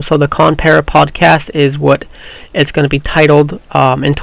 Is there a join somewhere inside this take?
no; 0 cuts

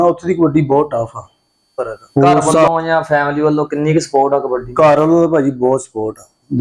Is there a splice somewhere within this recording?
yes; 1 cut; at 2.7 s

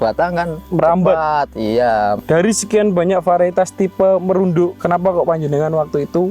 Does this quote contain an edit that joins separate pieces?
yes; 2 cuts; at 2.2 s, 4.8 s

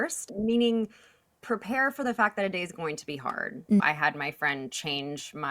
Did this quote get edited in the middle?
yes; 1 cut; at 3.8 s

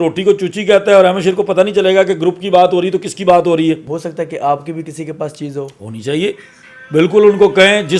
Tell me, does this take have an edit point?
yes; 1 cut; at 3.9 s

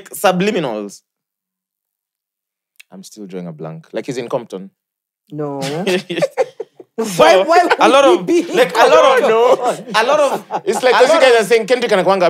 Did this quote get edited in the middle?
no; 0 cuts

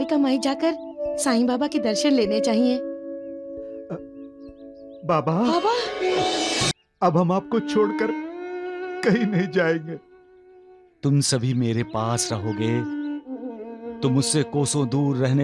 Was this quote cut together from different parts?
yes; 1 cut; at 6.8 s

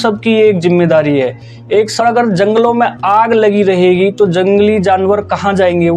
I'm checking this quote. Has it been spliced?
yes; 1 cut; at 2.0 s

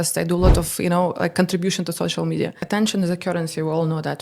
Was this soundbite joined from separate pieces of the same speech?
yes; 1 cut; at 2.6 s

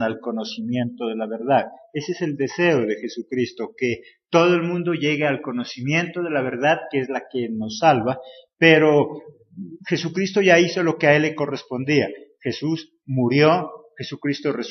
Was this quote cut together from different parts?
yes; 1 cut; at 12.5 s

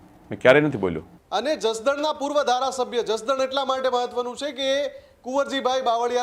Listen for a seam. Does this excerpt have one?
yes; 1 cut; at 1.1 s

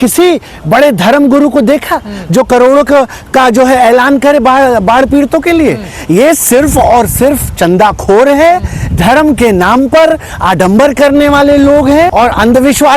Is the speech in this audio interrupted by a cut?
no; 0 cuts

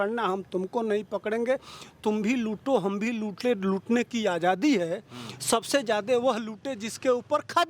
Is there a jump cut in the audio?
no; 0 cuts

